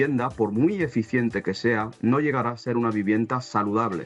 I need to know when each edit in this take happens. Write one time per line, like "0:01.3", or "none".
none